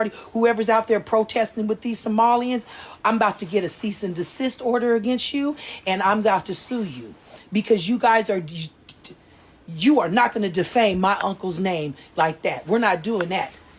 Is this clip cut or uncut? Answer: uncut